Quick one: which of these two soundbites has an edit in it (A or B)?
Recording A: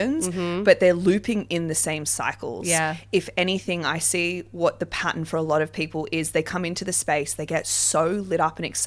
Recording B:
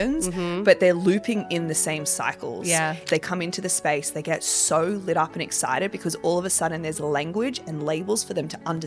B